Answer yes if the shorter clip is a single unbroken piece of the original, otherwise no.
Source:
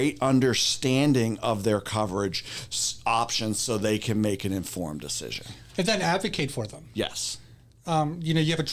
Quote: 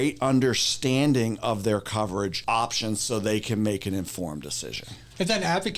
no